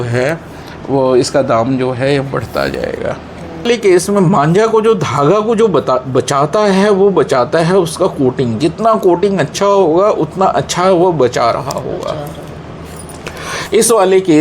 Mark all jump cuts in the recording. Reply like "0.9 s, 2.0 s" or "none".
3.7 s